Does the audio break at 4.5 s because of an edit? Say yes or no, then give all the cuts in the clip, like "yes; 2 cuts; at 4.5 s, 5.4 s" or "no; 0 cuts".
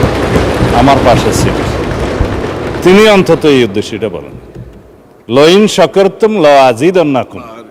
no; 0 cuts